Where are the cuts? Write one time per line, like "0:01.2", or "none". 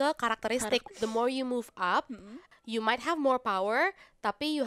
0:00.9
0:02.4